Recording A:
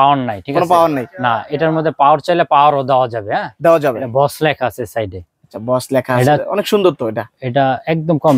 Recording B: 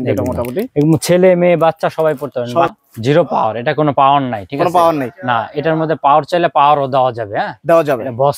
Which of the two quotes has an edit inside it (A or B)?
B